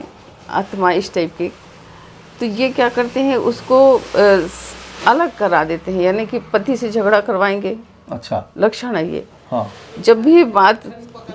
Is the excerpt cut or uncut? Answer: uncut